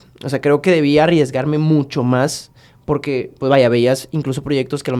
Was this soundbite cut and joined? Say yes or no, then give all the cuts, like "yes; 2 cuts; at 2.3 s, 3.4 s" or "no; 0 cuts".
no; 0 cuts